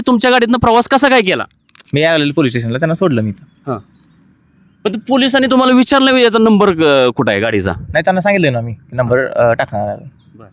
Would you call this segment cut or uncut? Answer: cut